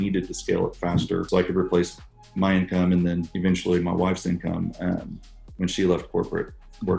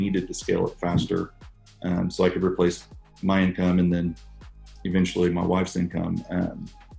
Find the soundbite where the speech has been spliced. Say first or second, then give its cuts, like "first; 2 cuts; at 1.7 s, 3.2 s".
first; 2 cuts; at 1.3 s, 3.3 s